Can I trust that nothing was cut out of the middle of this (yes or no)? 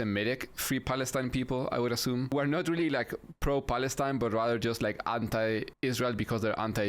no